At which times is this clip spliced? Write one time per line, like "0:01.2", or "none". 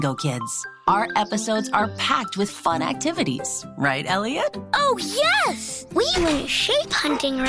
none